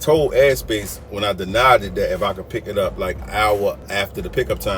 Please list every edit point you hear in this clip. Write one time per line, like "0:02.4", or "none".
0:03.2
0:03.8